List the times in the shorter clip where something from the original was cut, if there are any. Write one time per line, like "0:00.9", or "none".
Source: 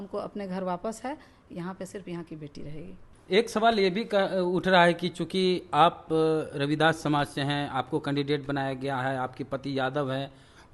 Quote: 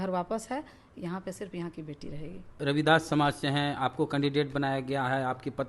0:02.6